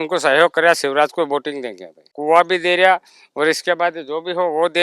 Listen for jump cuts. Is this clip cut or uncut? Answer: cut